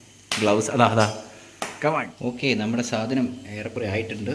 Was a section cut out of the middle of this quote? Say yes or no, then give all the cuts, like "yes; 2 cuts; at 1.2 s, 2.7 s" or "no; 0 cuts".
yes; 1 cut; at 2.1 s